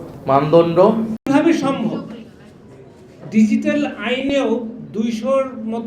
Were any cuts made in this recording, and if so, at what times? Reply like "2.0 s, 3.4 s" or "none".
1.3 s

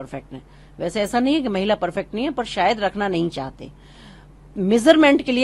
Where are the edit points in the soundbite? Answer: none

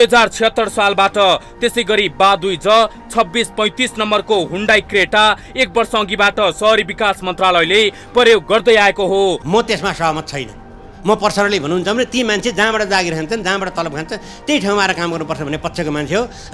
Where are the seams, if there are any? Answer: 9.4 s

